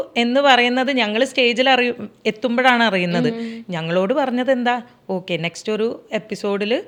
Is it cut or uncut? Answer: uncut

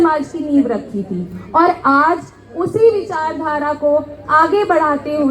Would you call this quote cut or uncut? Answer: uncut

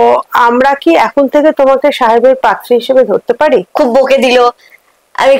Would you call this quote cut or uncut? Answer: cut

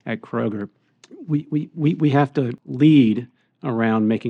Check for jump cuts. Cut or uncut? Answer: uncut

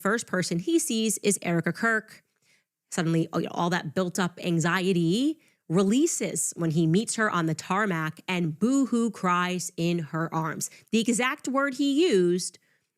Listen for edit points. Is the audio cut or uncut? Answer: uncut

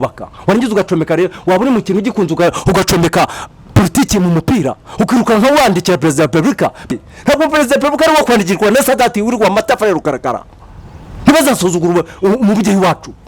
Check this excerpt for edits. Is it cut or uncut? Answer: cut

